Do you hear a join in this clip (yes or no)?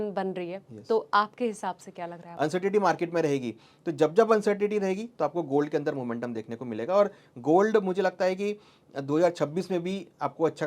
yes